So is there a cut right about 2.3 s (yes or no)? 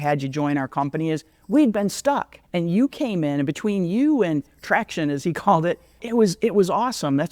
yes